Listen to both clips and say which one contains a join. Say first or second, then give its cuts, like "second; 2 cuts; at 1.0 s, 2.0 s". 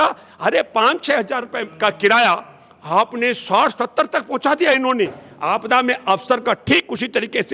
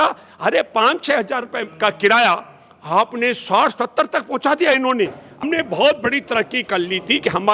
second; 1 cut; at 5.4 s